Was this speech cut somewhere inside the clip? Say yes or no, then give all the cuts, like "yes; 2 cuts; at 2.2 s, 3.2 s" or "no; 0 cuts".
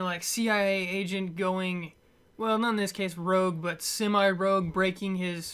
yes; 1 cut; at 2.7 s